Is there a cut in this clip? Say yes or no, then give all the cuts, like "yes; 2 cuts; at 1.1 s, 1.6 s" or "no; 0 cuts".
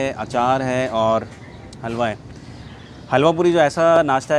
no; 0 cuts